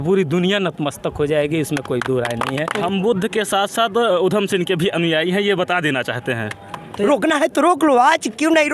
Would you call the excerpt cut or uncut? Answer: cut